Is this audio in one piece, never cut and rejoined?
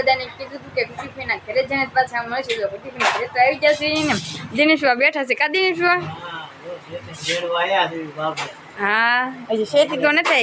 yes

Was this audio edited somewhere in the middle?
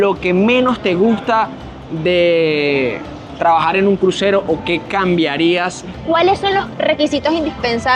yes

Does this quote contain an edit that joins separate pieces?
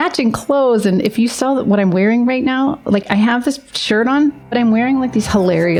no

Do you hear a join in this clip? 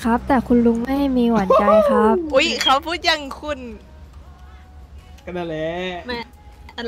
no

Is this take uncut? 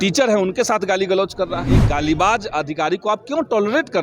no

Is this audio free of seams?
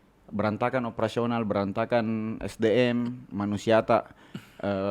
yes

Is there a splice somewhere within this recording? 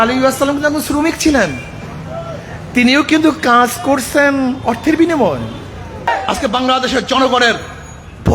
yes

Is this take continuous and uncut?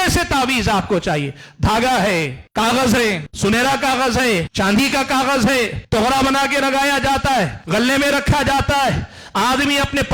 no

